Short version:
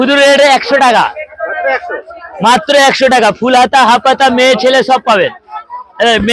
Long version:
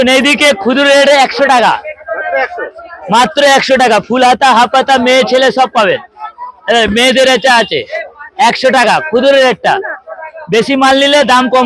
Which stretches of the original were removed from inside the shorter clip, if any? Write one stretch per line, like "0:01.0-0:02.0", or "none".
none